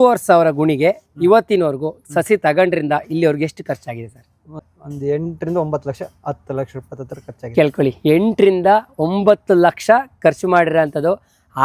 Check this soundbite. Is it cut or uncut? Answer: cut